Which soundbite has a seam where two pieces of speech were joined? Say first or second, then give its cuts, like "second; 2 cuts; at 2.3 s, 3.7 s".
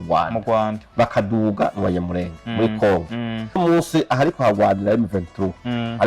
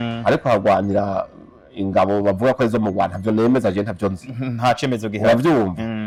first; 1 cut; at 3.6 s